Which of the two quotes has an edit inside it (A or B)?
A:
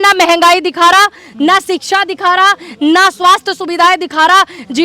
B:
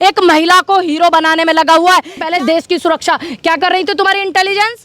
B